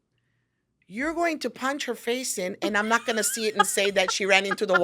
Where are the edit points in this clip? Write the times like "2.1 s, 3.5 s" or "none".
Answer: none